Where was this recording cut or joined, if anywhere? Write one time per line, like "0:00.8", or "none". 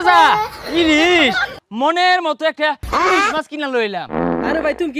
0:01.6